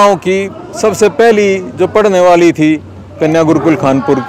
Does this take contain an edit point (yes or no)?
no